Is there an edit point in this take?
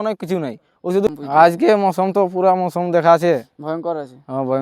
yes; 1 cut; at 1.1 s

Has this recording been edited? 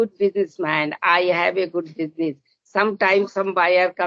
no; 0 cuts

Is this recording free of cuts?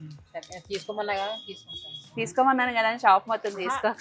yes; 0 cuts

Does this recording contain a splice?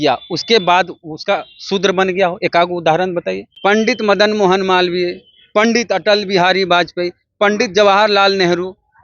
yes; 1 cut; at 3.4 s

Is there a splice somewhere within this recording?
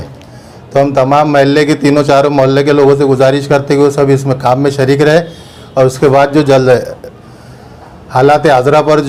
no; 0 cuts

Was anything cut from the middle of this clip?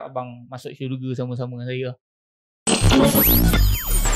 yes; 1 cut; at 2.0 s

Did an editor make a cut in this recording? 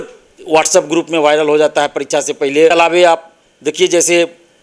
yes; 1 cut; at 2.7 s

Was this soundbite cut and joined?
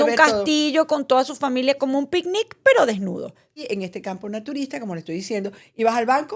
yes; 1 cut; at 3.6 s

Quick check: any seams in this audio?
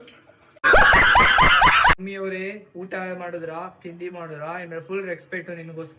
yes; 1 cut; at 2.0 s

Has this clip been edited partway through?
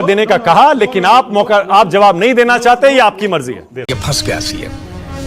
yes; 1 cut; at 3.7 s

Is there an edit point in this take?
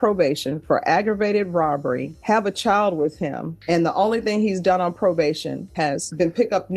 yes; 1 cut; at 5.7 s

